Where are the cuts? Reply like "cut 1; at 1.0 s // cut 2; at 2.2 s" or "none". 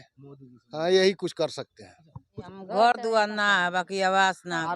cut 1; at 2.3 s